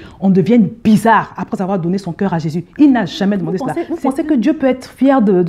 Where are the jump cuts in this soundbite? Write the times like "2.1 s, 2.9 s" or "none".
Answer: 3.8 s